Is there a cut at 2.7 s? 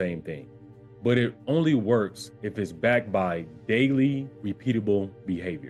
no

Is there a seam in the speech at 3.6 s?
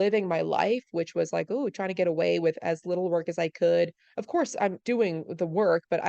no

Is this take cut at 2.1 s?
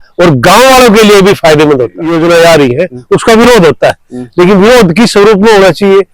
yes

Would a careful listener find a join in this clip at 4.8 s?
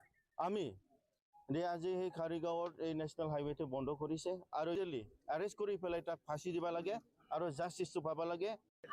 yes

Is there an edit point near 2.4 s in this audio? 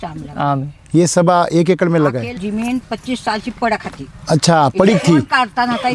yes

